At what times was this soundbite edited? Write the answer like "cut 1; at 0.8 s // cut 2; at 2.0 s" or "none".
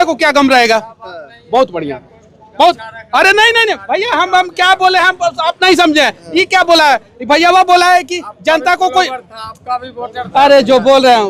none